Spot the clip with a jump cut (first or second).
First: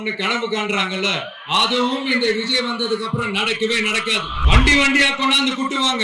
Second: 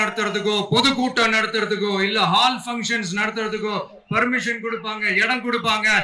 first